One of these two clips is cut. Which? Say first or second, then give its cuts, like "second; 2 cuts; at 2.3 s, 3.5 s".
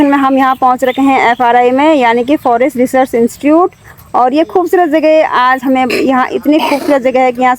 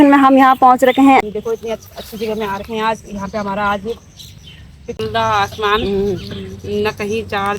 second; 2 cuts; at 1.2 s, 4.9 s